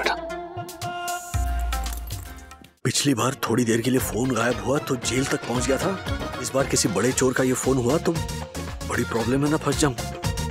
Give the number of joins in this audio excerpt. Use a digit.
1